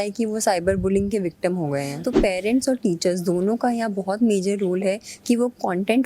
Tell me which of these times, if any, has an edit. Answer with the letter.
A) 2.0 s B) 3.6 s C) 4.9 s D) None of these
A